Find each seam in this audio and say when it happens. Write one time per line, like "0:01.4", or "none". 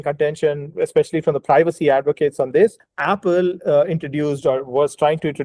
0:02.9